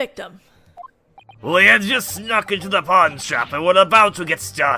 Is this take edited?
yes; 1 cut; at 2.6 s

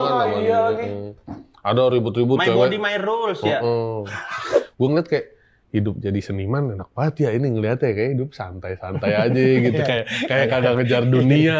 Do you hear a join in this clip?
yes; 1 cut; at 4.5 s

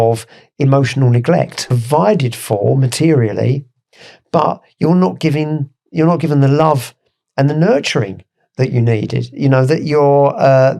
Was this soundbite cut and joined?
yes; 1 cut; at 1.7 s

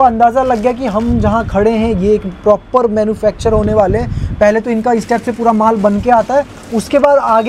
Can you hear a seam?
no; 0 cuts

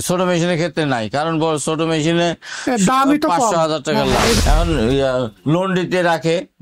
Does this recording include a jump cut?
yes; 1 cut; at 4.4 s

